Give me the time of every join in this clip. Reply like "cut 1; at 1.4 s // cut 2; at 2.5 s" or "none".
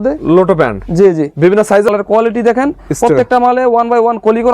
cut 1; at 1.9 s